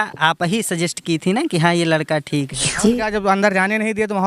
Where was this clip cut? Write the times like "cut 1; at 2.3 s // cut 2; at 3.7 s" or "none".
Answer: cut 1; at 2.8 s